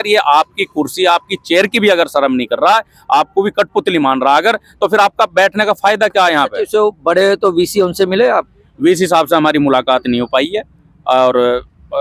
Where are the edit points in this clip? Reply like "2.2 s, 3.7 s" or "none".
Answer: none